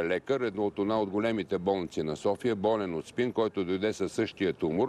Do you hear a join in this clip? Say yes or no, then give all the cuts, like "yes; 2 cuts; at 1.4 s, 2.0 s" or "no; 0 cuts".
no; 0 cuts